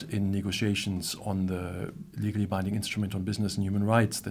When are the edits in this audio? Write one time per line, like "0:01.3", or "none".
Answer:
0:02.0

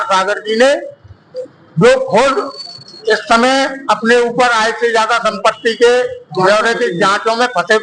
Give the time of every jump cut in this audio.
none

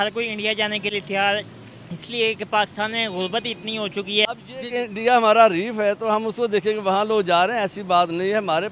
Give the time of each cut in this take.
0:04.2

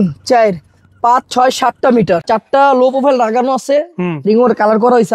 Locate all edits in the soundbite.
0:02.2

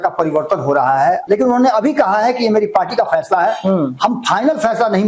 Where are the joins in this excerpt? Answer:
0:01.2

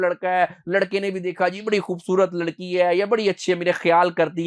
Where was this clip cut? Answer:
none

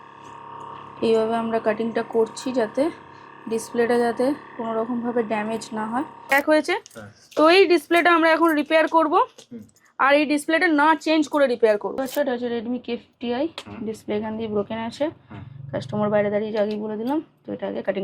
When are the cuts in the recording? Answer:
0:06.3
0:11.9

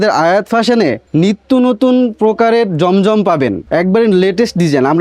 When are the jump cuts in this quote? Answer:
0:01.0
0:03.6

